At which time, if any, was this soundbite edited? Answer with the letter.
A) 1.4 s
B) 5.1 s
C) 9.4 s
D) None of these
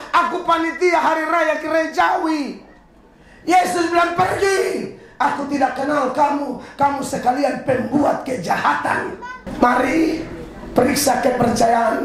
C